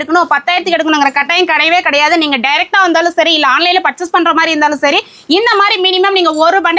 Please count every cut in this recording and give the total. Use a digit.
0